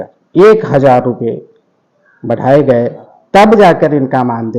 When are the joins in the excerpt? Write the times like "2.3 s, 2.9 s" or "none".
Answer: 3.1 s